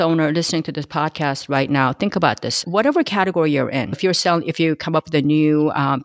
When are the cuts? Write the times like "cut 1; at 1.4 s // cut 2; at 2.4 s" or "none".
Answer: none